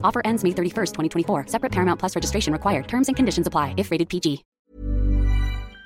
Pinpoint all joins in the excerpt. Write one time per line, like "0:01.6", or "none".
0:04.5

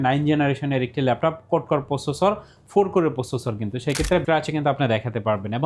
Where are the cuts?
0:04.2

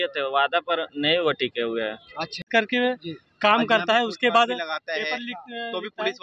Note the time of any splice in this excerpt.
0:02.5

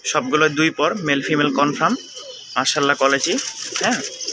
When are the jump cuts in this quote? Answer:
none

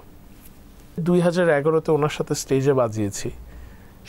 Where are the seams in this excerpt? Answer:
0:01.0

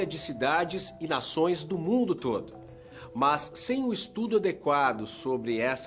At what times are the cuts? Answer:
none

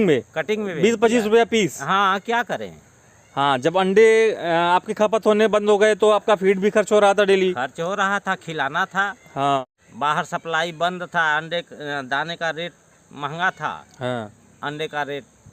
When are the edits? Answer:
0:09.6

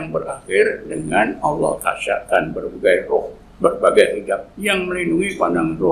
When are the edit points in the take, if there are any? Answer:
0:04.5

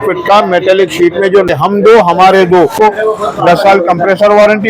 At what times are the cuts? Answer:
0:01.2
0:02.7

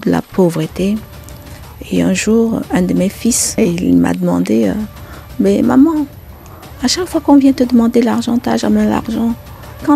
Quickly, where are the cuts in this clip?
0:03.6

